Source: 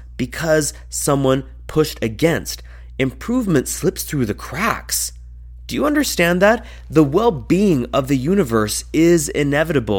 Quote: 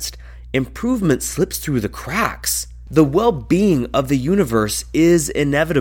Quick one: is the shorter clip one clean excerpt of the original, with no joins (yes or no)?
no